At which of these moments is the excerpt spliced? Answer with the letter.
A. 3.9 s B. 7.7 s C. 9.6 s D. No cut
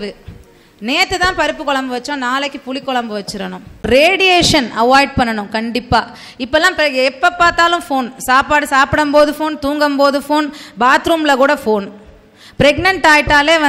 A